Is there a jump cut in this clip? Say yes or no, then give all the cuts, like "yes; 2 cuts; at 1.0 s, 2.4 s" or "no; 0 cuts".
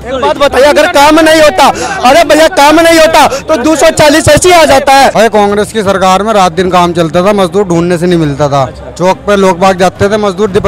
yes; 1 cut; at 5.1 s